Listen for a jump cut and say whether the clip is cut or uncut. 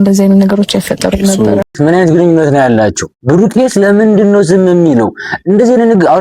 cut